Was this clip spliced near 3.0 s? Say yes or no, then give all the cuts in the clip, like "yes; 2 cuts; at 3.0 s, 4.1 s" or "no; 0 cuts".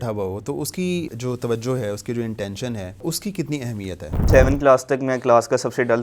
yes; 3 cuts; at 1.1 s, 3.0 s, 4.3 s